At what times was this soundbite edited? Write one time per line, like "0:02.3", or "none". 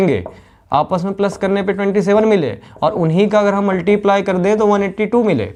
none